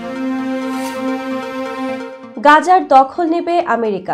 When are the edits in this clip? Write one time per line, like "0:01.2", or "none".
0:02.2